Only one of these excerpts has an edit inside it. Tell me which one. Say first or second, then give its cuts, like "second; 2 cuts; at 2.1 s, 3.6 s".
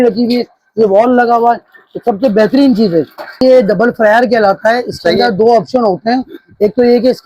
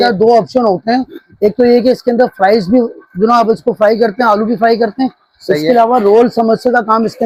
first; 1 cut; at 3.4 s